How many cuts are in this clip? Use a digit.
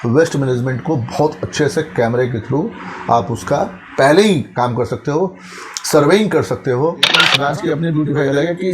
1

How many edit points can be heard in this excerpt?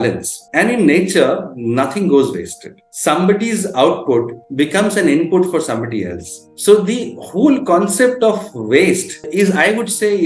0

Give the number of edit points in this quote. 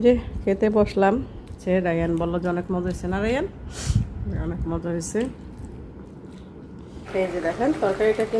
2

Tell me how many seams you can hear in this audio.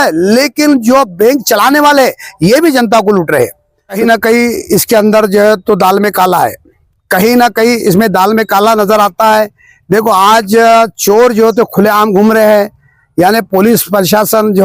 1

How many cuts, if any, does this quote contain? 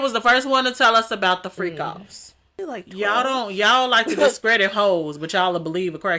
1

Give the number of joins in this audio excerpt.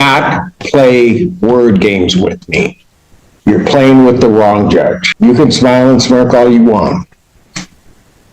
1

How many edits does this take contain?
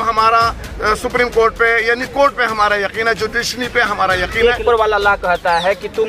1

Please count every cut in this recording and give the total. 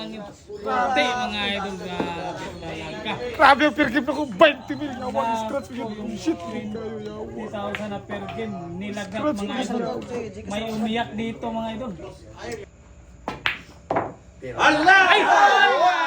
1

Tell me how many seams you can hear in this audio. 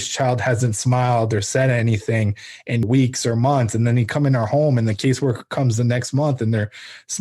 1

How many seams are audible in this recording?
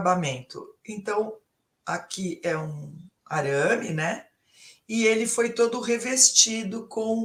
0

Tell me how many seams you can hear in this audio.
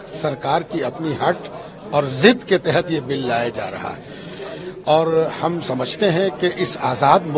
0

